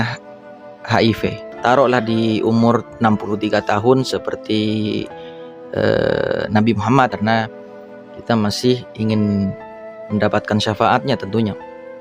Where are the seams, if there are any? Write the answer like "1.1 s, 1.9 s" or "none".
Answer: 1.5 s